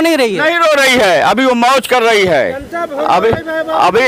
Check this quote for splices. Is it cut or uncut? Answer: uncut